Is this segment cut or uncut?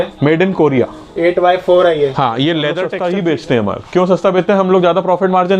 cut